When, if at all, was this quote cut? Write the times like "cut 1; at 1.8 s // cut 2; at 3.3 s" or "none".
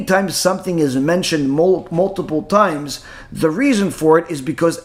none